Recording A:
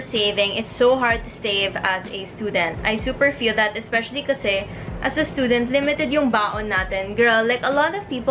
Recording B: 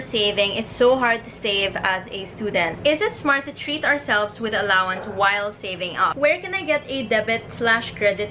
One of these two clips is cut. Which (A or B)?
B